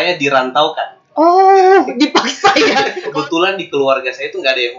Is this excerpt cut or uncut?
cut